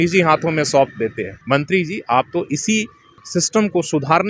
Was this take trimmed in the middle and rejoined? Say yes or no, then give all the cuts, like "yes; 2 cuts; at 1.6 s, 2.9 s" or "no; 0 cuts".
yes; 2 cuts; at 1.3 s, 3.2 s